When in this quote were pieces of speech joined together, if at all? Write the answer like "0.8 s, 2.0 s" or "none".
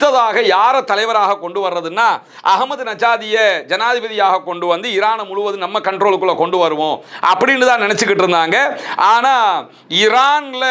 none